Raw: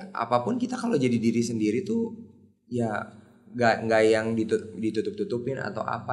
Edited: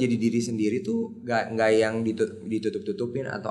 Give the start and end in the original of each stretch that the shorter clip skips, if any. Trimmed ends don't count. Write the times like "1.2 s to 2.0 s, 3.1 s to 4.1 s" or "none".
2.2 s to 3.5 s